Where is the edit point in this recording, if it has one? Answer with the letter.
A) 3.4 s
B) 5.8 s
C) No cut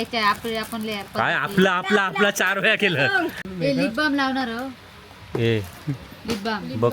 A